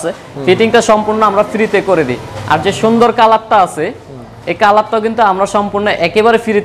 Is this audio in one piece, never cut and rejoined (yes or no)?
yes